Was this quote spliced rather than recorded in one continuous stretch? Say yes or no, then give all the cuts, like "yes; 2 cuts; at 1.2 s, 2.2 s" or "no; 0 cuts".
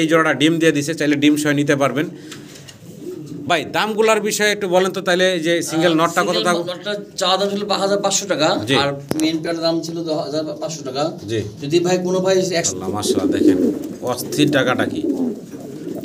no; 0 cuts